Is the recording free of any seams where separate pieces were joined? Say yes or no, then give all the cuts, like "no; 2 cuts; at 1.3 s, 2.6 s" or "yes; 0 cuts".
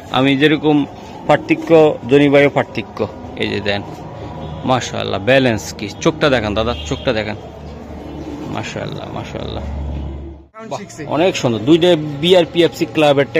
no; 1 cut; at 10.8 s